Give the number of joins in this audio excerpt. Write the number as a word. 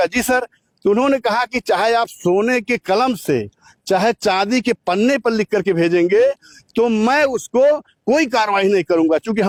zero